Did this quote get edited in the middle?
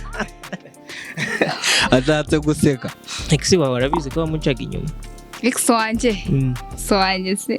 yes; 1 cut; at 3.0 s

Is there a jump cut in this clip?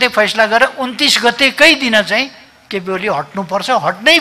no; 0 cuts

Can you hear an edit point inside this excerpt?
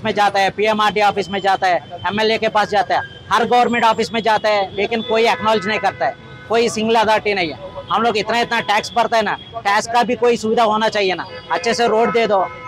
no; 0 cuts

